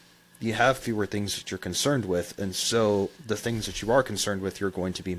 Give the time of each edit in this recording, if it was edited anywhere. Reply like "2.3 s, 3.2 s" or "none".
none